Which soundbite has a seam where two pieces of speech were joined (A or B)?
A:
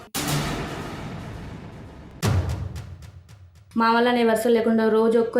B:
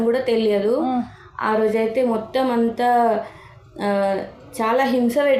A